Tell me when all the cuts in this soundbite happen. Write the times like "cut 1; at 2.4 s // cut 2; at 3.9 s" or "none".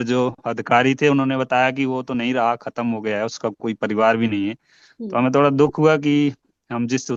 none